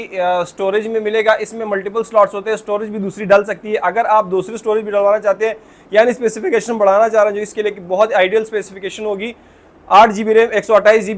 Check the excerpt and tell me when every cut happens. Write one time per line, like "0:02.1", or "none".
none